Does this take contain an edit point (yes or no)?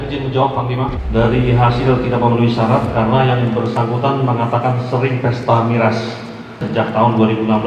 yes